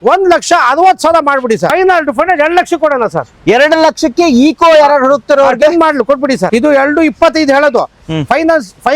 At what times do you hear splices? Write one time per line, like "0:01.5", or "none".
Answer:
0:01.7
0:06.4